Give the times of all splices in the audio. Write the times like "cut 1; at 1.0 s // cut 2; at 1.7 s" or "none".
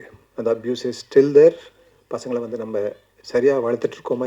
none